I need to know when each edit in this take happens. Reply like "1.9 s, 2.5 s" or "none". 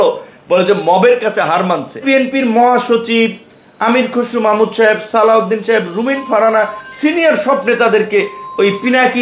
2.0 s